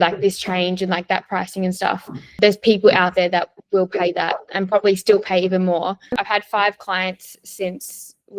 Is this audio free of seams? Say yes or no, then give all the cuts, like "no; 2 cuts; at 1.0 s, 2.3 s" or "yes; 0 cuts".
no; 2 cuts; at 2.4 s, 6.1 s